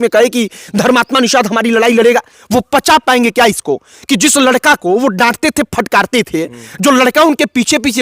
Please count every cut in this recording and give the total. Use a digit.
0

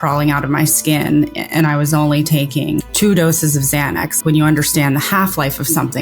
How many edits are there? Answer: 2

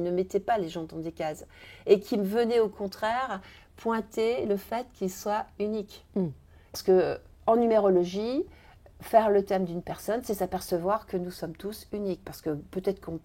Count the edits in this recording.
1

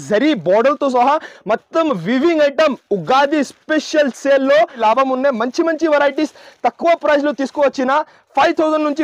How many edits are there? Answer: 1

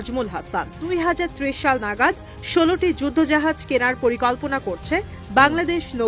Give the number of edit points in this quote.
1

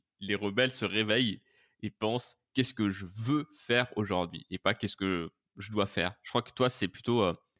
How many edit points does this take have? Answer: 0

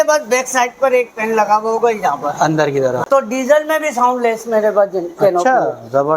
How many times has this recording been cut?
1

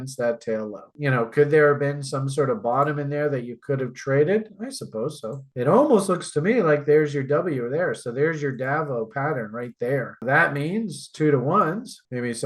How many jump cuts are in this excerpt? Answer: 3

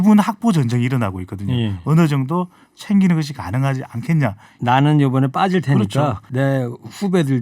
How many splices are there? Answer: 2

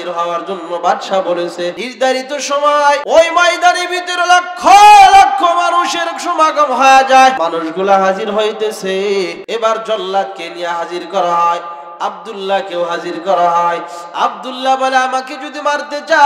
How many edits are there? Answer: 4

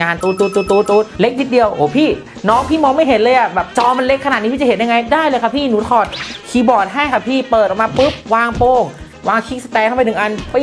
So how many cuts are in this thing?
0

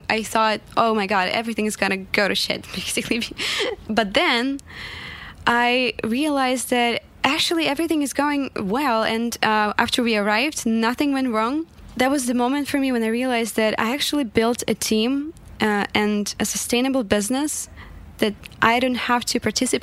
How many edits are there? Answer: 3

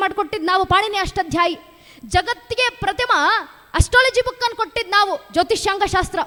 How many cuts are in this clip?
0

